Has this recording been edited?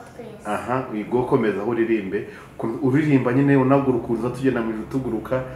no; 0 cuts

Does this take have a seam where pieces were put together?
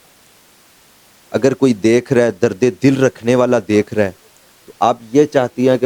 no; 0 cuts

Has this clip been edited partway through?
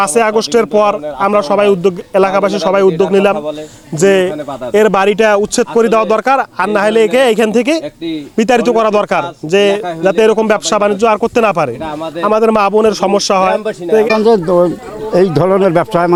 no; 0 cuts

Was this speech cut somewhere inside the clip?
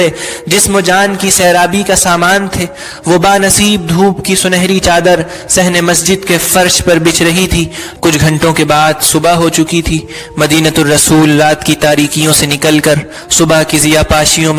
yes; 1 cut; at 7.8 s

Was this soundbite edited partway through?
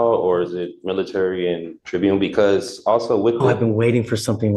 yes; 1 cut; at 1.7 s

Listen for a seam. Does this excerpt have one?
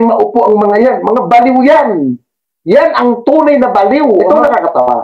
yes; 1 cut; at 4.1 s

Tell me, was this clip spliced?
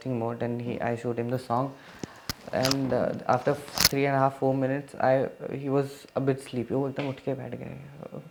no; 0 cuts

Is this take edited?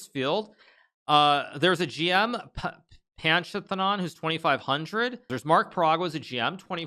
yes; 1 cut; at 5.3 s

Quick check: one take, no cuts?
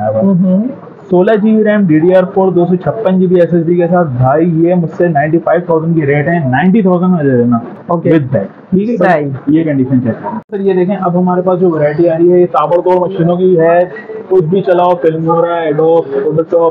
no; 1 cut; at 10.5 s

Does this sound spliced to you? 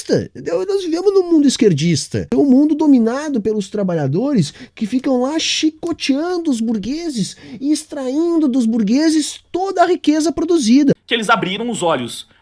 yes; 2 cuts; at 2.3 s, 11.1 s

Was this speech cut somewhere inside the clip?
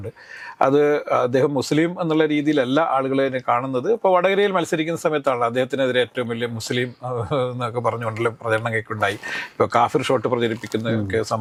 no; 0 cuts

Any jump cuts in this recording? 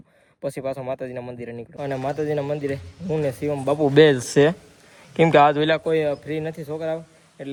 no; 0 cuts

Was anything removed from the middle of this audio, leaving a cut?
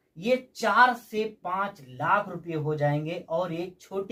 no; 0 cuts

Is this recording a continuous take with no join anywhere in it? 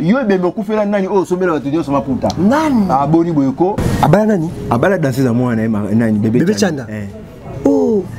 no; 1 cut; at 3.8 s

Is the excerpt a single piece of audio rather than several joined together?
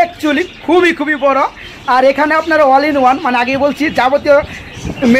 yes; 0 cuts

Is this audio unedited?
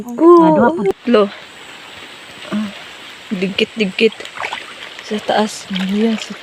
no; 1 cut; at 0.9 s

